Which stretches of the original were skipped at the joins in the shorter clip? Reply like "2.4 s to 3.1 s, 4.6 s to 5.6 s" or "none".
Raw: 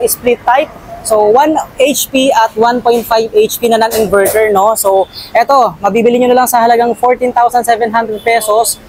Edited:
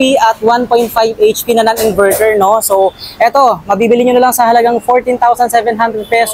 none